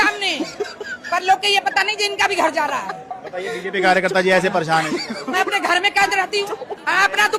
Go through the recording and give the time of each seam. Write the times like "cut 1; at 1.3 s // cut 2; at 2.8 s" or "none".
cut 1; at 5.2 s